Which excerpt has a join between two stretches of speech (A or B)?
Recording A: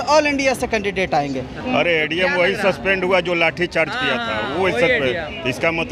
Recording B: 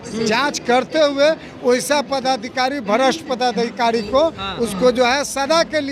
A